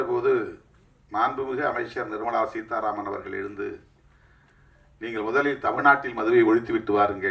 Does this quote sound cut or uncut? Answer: uncut